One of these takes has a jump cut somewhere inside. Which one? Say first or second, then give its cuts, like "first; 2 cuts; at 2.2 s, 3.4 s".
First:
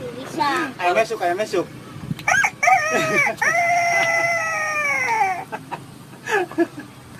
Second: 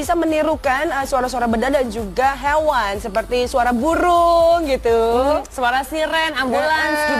first; 1 cut; at 6.1 s